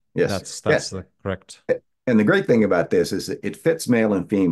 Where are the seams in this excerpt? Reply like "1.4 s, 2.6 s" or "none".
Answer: none